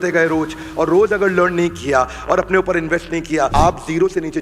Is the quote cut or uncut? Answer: cut